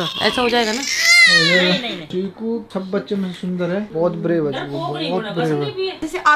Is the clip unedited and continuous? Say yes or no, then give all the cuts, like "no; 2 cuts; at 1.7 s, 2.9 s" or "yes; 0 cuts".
yes; 0 cuts